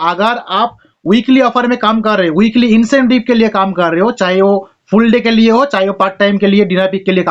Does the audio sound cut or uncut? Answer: uncut